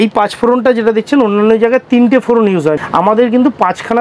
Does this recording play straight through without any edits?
no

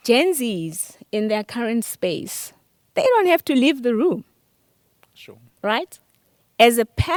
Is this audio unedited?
yes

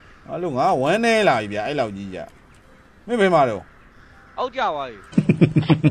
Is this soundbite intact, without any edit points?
no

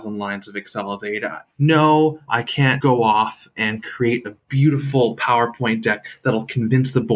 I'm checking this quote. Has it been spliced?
yes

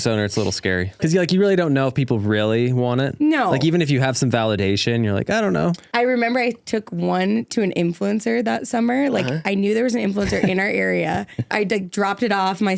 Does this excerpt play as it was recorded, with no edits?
no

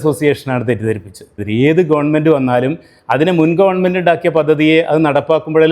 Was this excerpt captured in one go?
no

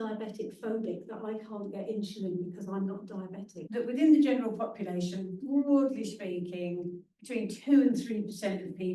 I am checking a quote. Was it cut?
yes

